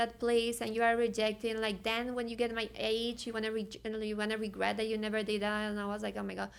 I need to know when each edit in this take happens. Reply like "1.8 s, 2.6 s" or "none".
none